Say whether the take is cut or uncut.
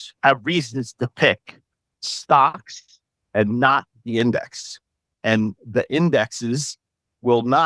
uncut